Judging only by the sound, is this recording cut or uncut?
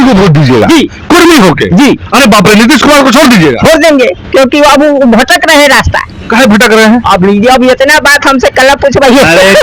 uncut